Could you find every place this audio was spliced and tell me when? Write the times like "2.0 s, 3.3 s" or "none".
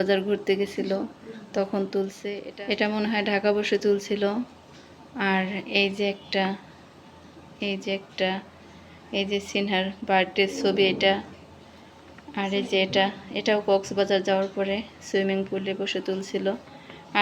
2.5 s